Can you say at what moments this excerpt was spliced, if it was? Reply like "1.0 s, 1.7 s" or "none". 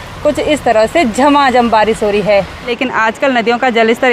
2.7 s